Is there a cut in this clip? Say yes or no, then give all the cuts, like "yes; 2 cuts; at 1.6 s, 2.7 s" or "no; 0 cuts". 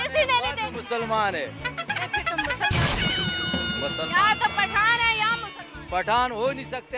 no; 0 cuts